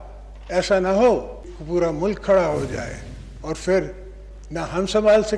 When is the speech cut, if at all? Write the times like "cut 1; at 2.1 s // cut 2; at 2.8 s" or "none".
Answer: cut 1; at 1.5 s